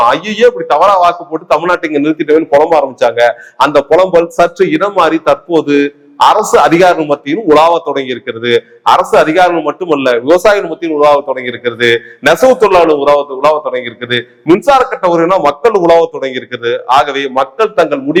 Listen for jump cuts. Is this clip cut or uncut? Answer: uncut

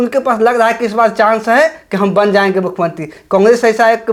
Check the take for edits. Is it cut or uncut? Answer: uncut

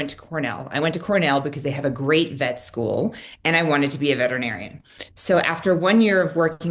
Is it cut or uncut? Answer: uncut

